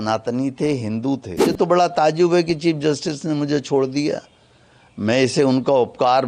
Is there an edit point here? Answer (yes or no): yes